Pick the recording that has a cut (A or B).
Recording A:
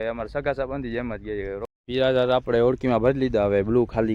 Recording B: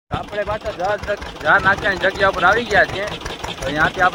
A